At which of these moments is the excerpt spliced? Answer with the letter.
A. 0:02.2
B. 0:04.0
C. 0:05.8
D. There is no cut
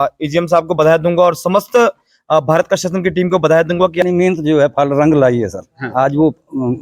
B